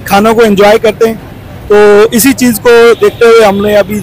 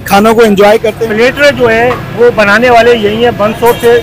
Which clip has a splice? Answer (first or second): second